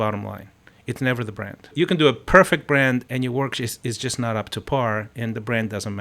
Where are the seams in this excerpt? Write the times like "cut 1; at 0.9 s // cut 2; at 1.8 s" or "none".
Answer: cut 1; at 1.7 s // cut 2; at 3.1 s